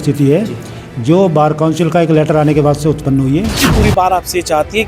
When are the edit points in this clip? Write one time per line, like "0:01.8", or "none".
0:03.6